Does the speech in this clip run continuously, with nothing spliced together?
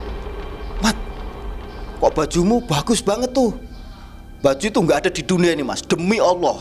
yes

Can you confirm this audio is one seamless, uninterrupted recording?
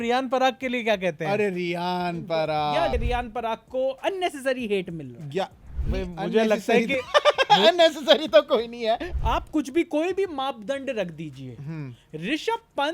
no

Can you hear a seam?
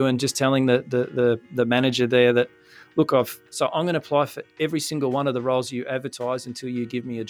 yes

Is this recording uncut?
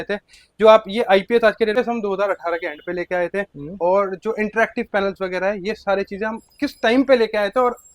no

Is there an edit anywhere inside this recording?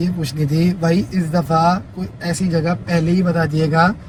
no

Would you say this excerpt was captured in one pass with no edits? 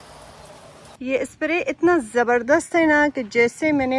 no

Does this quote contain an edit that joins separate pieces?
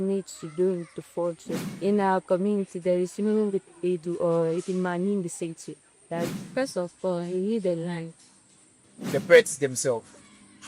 yes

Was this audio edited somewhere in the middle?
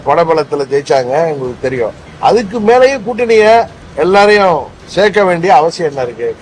yes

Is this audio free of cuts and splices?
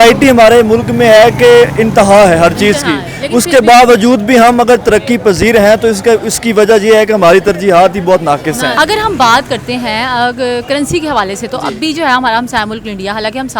no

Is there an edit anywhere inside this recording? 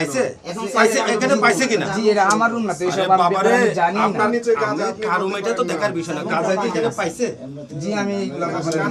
no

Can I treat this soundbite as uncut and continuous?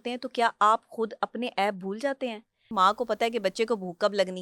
no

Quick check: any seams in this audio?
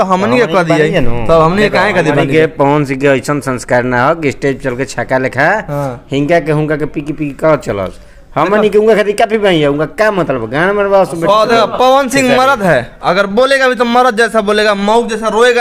no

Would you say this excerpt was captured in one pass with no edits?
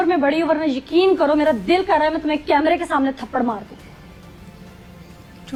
yes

